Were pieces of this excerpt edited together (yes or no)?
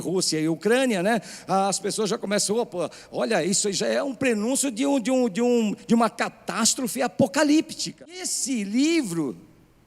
yes